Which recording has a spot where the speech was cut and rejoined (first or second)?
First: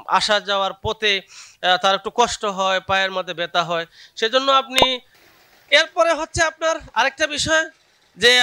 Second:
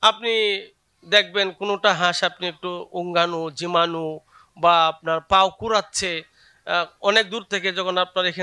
first